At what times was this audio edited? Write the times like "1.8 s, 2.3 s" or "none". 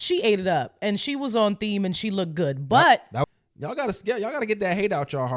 3.2 s